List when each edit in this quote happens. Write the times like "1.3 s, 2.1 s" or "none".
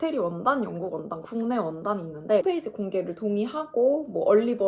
2.4 s

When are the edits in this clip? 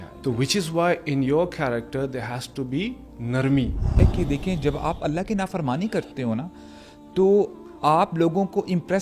4.0 s

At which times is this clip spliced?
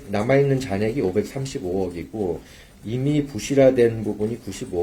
none

